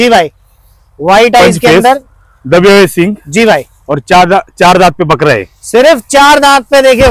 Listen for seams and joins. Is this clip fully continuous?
yes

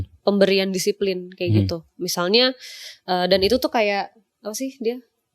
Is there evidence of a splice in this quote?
no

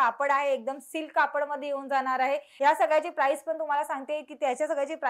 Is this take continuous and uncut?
no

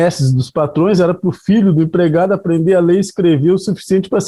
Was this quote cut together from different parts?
no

